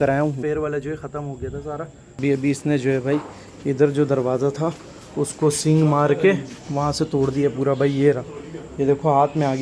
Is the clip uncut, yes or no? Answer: no